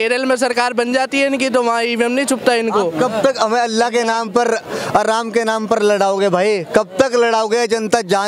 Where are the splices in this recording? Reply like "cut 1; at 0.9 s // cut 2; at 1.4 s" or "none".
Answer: none